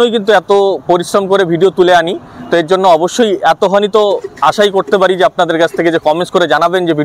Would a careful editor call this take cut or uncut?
uncut